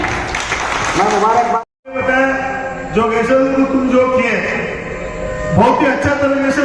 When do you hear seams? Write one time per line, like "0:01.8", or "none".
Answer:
0:01.8

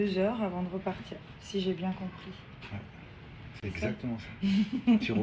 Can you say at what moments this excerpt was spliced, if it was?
0:03.8

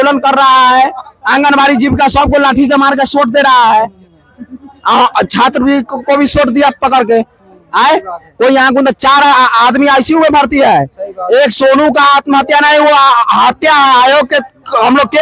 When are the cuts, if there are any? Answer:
none

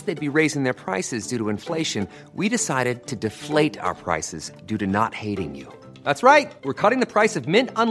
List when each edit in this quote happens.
none

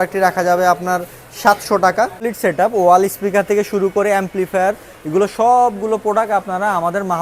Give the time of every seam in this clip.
0:02.2

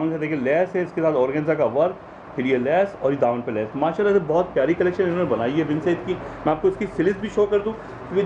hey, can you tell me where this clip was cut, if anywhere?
none

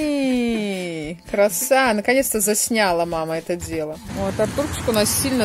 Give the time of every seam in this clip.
0:04.0

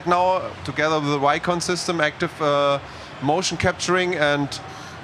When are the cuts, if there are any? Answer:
none

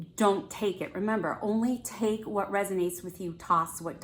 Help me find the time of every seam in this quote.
none

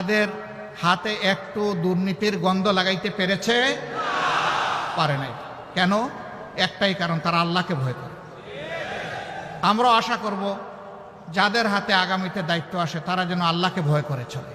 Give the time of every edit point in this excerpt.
none

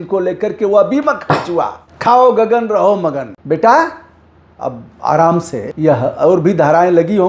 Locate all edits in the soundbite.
0:01.8
0:03.3
0:05.6

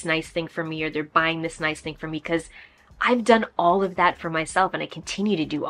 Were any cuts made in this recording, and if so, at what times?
none

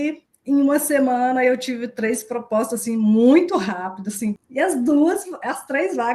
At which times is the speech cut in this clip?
0:04.4

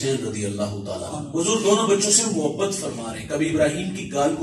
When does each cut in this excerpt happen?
0:01.1

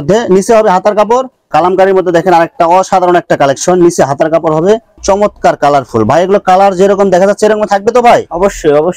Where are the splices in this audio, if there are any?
0:01.4
0:05.0

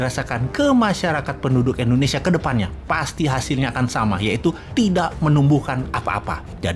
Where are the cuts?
none

